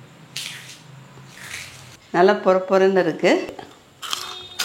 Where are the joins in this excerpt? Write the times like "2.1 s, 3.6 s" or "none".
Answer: 2.0 s